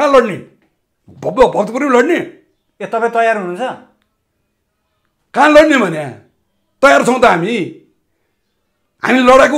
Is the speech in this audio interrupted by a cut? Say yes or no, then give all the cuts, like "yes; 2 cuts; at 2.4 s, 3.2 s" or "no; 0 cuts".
no; 0 cuts